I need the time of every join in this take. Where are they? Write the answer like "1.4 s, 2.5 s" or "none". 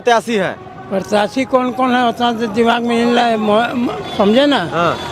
none